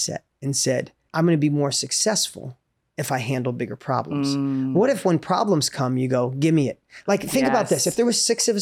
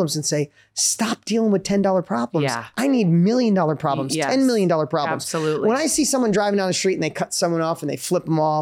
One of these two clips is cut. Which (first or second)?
first